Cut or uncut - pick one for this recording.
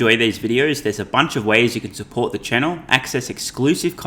uncut